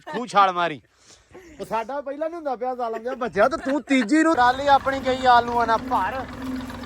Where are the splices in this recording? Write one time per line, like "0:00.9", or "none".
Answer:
0:04.4